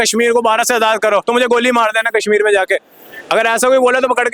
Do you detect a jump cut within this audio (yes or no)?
no